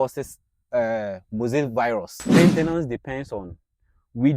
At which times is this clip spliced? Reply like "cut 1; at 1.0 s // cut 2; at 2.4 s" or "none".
cut 1; at 2.1 s